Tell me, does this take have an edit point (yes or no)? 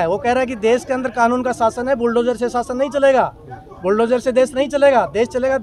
no